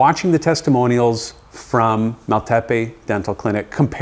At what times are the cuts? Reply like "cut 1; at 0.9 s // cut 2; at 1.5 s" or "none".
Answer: none